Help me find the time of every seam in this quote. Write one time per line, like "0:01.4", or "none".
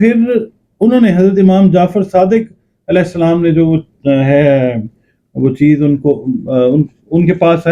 none